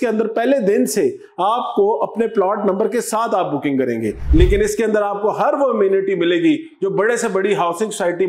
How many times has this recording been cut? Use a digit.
1